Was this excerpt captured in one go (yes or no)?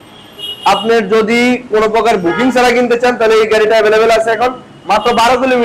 yes